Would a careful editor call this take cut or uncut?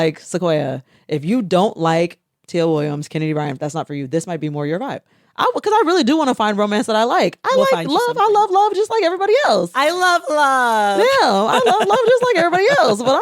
uncut